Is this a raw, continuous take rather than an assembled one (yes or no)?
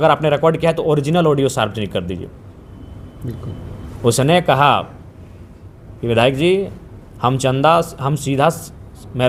yes